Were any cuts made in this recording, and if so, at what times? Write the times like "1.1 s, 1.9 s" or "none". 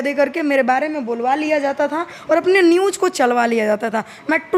none